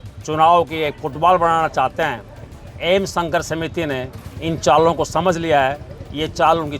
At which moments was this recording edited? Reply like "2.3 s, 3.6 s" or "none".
2.6 s